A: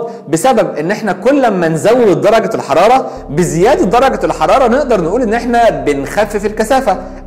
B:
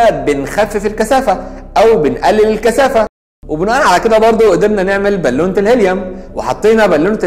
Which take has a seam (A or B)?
B